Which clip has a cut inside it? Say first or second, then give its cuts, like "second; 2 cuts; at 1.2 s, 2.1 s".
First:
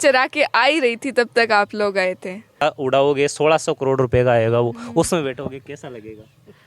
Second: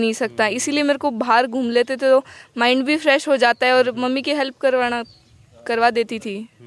first; 1 cut; at 2.6 s